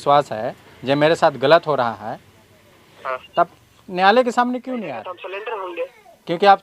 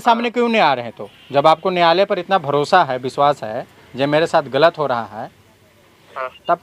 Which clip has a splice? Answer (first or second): first